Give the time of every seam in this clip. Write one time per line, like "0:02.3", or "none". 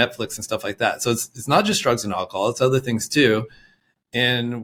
none